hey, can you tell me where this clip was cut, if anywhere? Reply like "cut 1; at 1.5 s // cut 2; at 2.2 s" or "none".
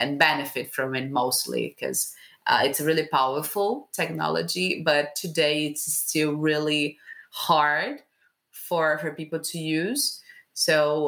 none